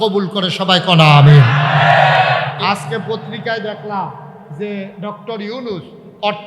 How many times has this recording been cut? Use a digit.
1